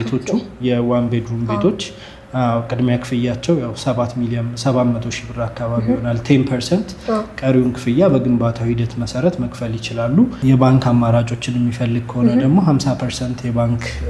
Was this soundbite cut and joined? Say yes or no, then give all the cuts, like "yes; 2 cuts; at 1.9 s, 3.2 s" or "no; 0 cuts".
yes; 1 cut; at 10.4 s